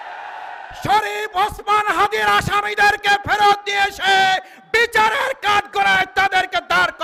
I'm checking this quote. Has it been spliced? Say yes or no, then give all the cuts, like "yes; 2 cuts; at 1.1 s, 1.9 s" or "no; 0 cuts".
no; 0 cuts